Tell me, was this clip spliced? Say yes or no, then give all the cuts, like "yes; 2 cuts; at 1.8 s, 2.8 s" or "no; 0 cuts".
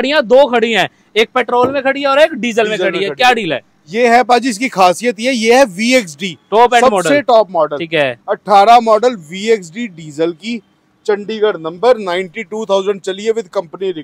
no; 0 cuts